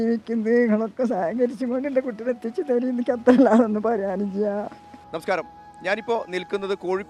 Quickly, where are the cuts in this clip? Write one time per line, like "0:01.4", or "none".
none